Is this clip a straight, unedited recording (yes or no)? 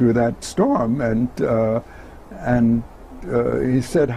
yes